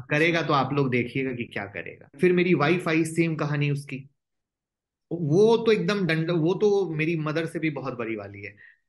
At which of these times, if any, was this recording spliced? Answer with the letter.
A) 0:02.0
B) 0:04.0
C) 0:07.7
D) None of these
A